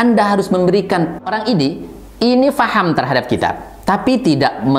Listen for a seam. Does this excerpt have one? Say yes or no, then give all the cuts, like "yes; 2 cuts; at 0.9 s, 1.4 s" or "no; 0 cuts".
yes; 1 cut; at 1.2 s